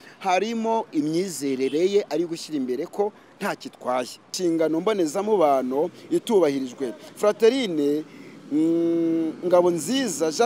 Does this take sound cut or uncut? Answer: cut